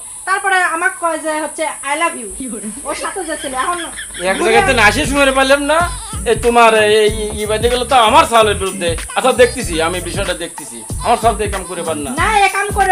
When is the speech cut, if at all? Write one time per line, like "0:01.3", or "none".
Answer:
none

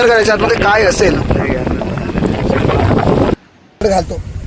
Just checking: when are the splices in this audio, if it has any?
0:03.3

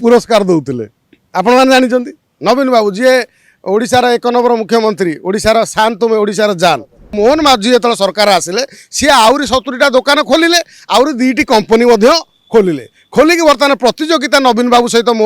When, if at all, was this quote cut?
0:07.1

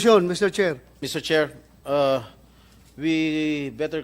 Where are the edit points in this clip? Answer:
0:00.9

